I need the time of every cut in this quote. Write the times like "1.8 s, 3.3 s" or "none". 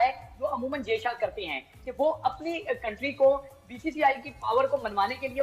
none